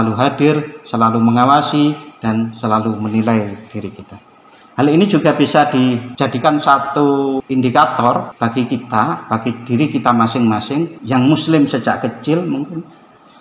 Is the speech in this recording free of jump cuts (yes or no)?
no